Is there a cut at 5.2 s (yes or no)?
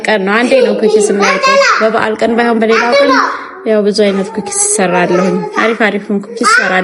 no